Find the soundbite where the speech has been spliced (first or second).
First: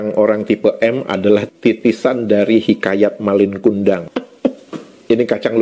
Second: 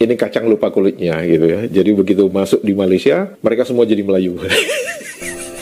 first